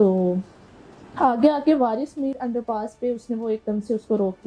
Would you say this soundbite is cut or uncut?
uncut